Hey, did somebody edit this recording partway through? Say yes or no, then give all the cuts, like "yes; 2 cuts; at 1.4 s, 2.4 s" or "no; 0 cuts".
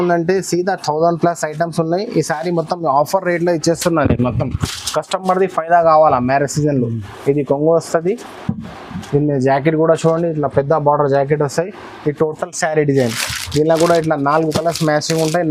no; 0 cuts